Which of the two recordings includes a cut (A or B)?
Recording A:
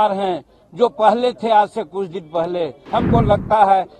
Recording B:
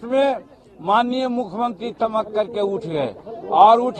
A